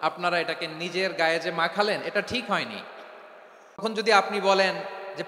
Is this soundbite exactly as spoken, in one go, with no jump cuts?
no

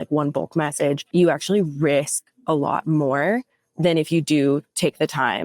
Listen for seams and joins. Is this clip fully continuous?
no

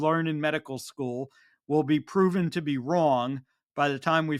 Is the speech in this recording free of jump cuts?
yes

